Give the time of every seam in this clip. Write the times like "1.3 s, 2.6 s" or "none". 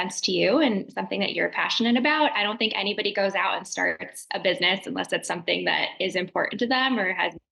none